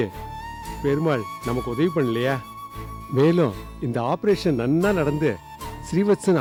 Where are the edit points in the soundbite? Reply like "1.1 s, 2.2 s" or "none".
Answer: none